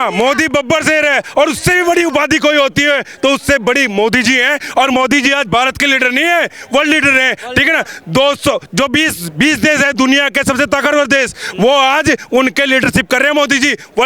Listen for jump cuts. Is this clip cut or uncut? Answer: uncut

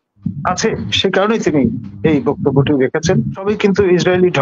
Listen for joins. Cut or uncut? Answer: cut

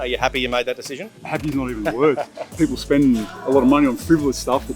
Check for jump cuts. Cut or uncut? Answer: cut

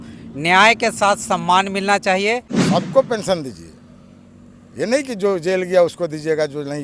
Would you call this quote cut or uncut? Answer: cut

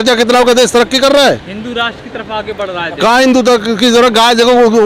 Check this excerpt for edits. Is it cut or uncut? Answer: uncut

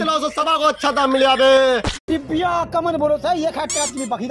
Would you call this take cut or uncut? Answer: cut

